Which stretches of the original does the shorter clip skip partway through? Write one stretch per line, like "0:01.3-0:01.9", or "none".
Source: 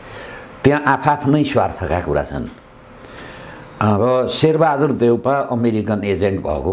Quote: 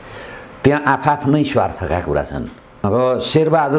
0:02.8-0:03.9